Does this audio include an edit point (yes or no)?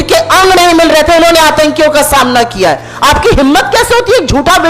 no